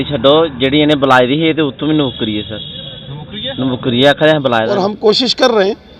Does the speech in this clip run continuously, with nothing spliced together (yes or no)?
no